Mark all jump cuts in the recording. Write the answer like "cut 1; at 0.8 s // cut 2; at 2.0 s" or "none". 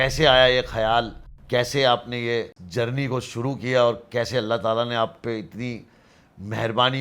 none